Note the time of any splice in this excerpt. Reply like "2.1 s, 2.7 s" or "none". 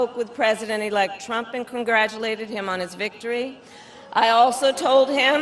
none